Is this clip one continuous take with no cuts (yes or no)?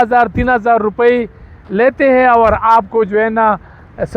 yes